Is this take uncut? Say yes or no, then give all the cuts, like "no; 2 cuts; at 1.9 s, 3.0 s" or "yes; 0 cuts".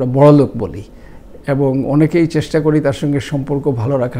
yes; 0 cuts